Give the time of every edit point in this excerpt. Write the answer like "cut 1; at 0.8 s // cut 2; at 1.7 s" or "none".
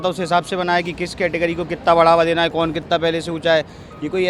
none